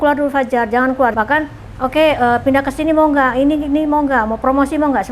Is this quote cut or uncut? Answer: cut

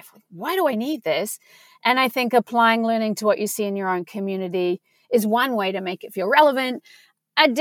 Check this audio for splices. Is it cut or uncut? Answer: uncut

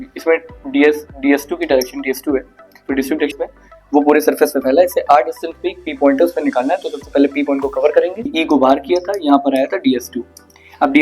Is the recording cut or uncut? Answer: cut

